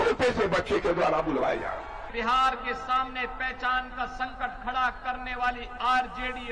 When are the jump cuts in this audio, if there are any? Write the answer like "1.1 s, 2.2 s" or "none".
2.0 s